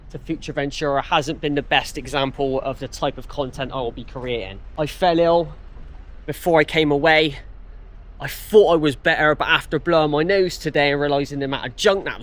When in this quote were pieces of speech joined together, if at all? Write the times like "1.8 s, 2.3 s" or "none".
4.6 s